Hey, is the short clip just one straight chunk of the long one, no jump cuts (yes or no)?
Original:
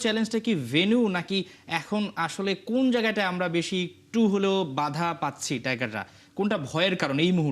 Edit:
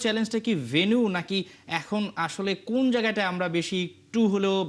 yes